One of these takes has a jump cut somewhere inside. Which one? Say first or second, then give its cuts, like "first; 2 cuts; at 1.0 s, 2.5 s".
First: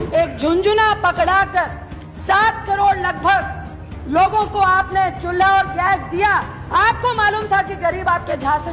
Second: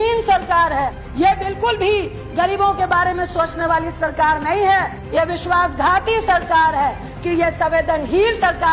second; 3 cuts; at 1.0 s, 5.0 s, 7.1 s